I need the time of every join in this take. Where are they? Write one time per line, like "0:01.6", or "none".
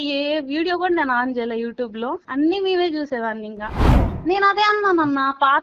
0:02.2
0:04.1